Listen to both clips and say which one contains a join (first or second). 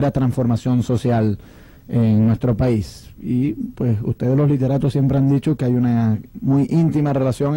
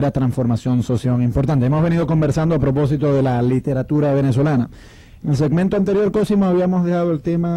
first